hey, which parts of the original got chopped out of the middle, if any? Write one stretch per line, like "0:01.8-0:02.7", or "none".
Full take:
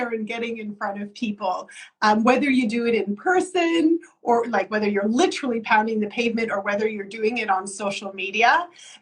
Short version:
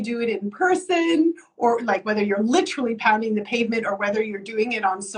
none